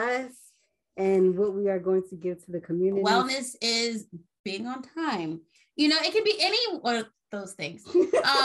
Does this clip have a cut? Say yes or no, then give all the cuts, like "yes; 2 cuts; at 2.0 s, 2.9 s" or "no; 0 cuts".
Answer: yes; 1 cut; at 3.0 s